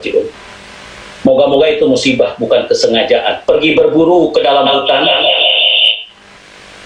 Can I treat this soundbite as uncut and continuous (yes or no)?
no